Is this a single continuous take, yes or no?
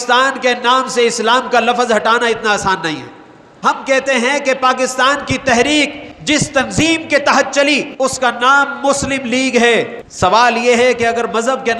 no